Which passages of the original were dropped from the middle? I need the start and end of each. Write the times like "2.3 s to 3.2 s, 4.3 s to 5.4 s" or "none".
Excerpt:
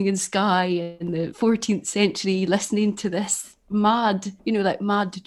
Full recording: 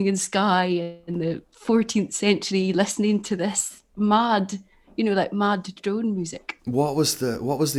1.1 s to 1.4 s, 4.6 s to 4.8 s